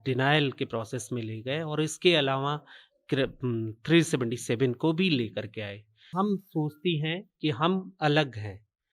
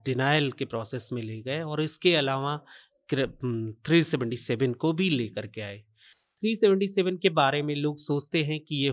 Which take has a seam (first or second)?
first